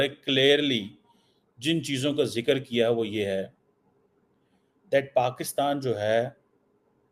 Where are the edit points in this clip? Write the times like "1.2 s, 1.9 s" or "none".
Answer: none